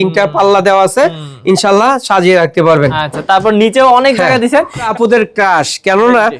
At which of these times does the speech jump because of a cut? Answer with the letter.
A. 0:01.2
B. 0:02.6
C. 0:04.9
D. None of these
C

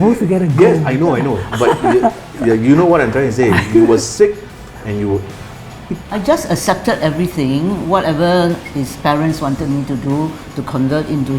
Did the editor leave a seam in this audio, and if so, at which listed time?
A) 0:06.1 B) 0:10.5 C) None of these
A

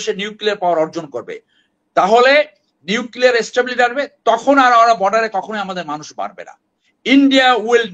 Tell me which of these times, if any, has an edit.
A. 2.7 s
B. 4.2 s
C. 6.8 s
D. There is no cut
C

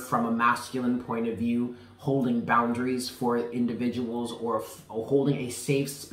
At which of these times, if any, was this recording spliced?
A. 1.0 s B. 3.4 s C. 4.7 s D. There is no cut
D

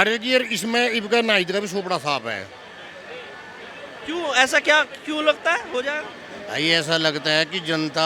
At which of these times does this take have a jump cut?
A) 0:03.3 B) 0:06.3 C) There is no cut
C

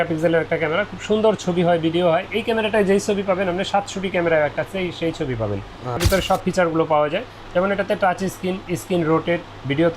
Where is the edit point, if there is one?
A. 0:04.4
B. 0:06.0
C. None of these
B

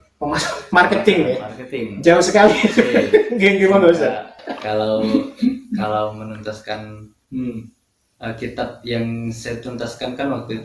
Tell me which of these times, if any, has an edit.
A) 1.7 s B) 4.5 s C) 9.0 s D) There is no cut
B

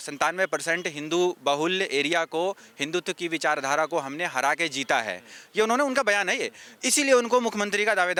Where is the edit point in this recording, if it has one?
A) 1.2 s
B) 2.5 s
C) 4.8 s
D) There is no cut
D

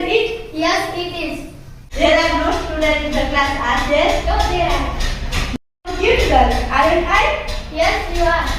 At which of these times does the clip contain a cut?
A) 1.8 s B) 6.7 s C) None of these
A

